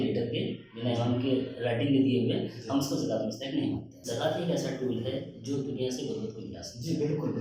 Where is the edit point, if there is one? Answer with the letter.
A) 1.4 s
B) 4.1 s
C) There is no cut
B